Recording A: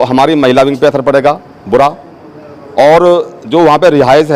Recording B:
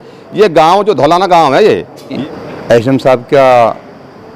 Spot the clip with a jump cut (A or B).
B